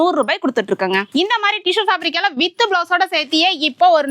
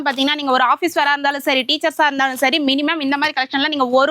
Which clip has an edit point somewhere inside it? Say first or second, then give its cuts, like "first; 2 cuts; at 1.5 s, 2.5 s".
first; 1 cut; at 1.1 s